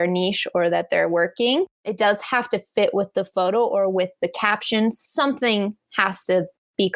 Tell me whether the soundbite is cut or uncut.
cut